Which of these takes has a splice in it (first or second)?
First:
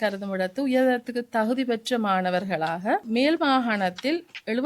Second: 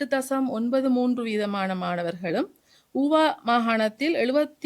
first